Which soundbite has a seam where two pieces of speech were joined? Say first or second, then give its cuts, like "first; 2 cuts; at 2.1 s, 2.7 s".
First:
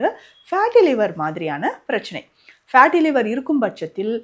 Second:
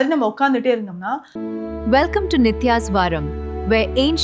second; 1 cut; at 1.3 s